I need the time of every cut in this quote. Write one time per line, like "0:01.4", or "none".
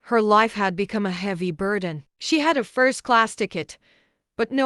0:02.1